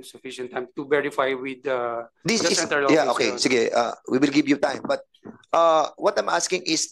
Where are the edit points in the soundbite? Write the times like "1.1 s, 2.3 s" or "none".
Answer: none

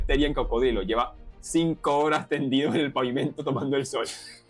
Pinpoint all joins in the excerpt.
none

